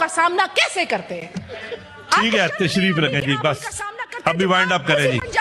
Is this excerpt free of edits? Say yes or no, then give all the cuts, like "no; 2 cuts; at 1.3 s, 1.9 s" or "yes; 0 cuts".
yes; 0 cuts